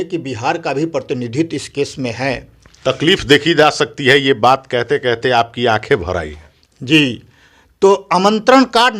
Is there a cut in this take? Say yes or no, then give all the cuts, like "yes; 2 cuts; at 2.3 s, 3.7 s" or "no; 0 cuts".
no; 0 cuts